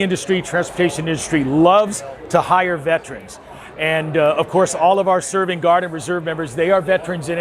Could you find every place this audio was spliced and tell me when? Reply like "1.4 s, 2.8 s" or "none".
none